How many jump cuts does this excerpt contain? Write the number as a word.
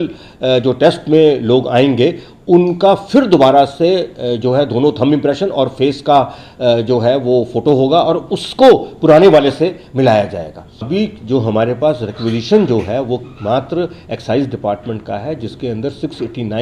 one